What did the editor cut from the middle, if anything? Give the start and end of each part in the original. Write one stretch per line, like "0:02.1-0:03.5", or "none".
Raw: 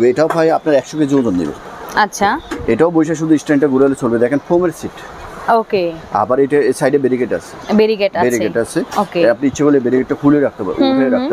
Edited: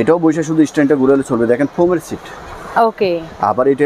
none